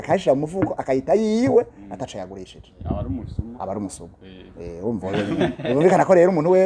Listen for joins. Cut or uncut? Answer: uncut